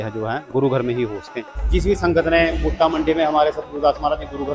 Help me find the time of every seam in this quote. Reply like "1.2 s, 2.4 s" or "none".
1.6 s